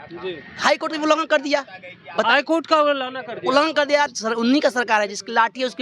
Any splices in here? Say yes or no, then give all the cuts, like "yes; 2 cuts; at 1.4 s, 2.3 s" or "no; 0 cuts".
yes; 1 cut; at 4.1 s